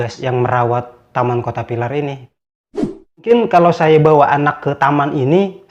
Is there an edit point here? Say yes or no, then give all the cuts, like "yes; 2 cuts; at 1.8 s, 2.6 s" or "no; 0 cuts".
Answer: yes; 1 cut; at 2.6 s